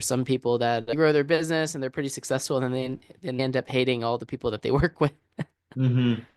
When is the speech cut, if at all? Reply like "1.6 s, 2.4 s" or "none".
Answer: 0.9 s, 3.4 s